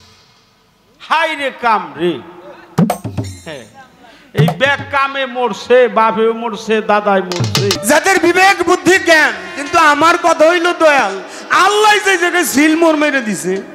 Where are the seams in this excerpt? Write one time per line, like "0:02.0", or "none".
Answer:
0:07.7